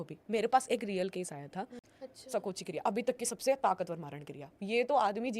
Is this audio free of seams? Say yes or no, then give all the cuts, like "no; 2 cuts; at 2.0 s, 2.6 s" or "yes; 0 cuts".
no; 1 cut; at 1.8 s